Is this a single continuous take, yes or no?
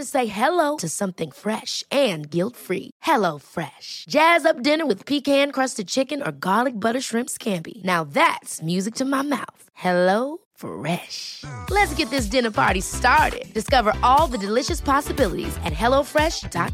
yes